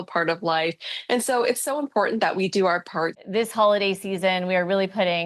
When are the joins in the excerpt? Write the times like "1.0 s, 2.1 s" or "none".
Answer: 3.2 s